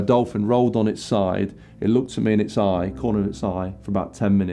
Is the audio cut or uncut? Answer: uncut